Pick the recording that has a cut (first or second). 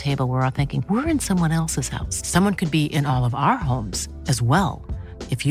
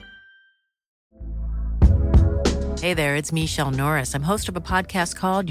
second